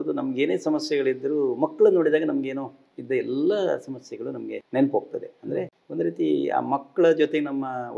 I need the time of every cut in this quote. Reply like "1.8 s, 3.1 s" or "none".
4.5 s, 5.8 s